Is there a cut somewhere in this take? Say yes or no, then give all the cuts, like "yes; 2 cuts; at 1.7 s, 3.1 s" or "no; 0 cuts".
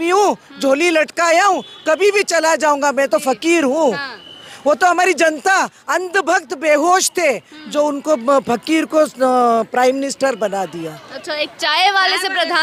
no; 0 cuts